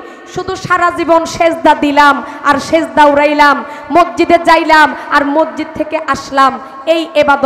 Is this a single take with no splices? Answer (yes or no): yes